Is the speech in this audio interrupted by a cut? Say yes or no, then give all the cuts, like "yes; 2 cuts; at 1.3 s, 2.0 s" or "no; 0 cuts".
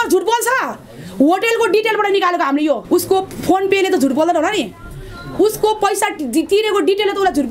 yes; 1 cut; at 2.8 s